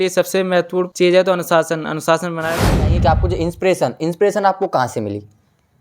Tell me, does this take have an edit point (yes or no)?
yes